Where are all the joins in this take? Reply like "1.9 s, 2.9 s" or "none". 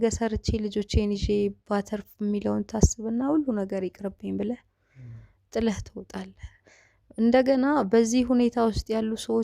none